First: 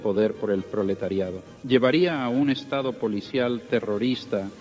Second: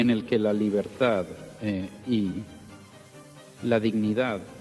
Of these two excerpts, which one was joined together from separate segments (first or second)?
first